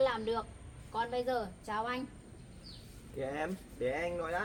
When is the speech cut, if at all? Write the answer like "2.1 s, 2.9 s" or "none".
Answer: none